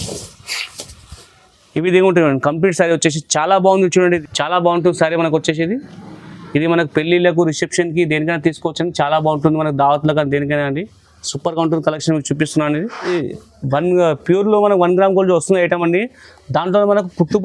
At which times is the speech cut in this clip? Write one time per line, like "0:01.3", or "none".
0:04.2
0:13.1